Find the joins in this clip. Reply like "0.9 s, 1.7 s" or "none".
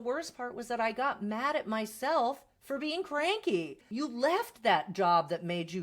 3.8 s